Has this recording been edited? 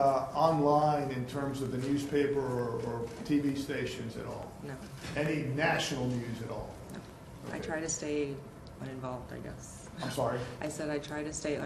yes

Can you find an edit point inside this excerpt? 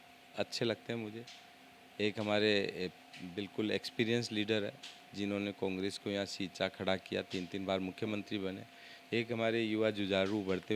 no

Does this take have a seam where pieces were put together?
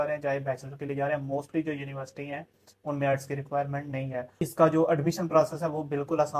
yes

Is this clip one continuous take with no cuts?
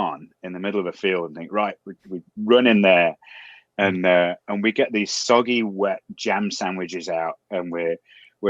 yes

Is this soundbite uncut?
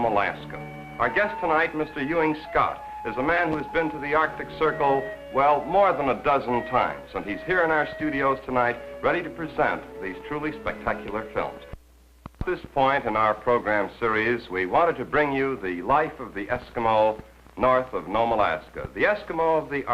no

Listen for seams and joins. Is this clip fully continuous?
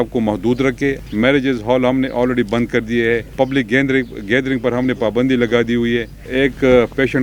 no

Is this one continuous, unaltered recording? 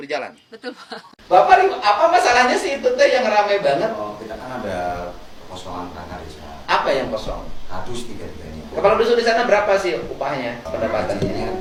yes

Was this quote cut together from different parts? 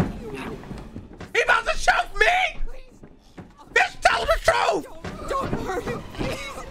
no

